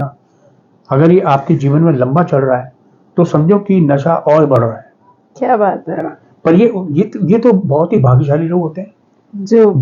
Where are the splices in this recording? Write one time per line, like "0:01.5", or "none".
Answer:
none